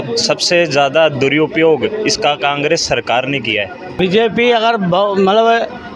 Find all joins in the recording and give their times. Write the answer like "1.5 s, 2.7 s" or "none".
3.8 s